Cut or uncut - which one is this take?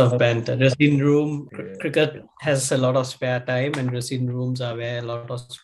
cut